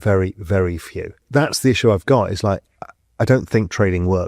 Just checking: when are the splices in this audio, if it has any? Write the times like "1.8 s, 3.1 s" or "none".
1.1 s